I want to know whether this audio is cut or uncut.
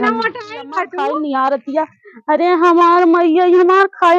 cut